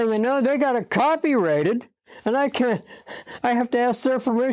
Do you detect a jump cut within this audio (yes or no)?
no